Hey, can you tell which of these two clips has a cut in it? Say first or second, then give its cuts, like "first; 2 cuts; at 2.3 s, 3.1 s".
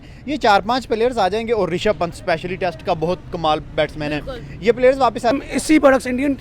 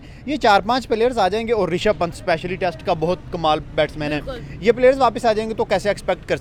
first; 1 cut; at 5.3 s